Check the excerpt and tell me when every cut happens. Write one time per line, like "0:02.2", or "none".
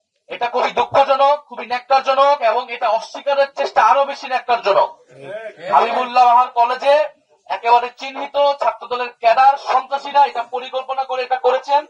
none

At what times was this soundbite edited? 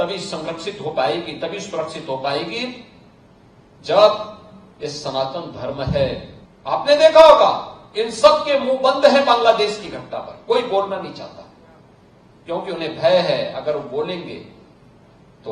0:06.3

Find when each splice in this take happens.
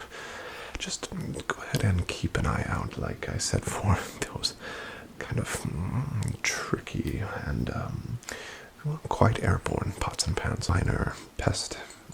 0:10.7

